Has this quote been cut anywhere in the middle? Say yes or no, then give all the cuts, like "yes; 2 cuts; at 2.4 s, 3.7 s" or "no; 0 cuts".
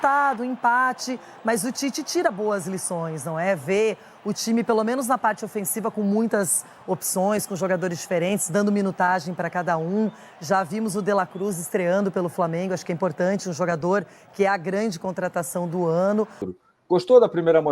yes; 1 cut; at 16.5 s